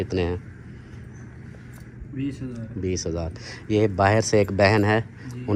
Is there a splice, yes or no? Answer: no